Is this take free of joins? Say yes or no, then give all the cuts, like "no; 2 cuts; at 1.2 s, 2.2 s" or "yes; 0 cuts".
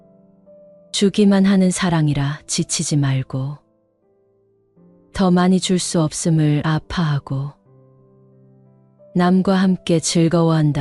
no; 1 cut; at 0.9 s